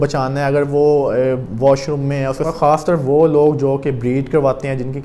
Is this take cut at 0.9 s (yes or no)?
no